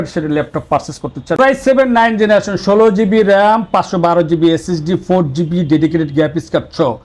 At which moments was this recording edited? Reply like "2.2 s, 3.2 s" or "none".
1.4 s